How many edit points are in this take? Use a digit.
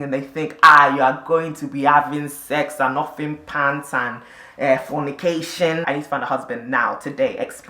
1